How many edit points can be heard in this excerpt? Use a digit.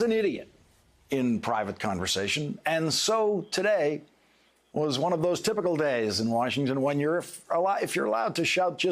1